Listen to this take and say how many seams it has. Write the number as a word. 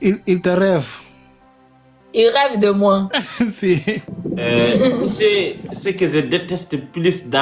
one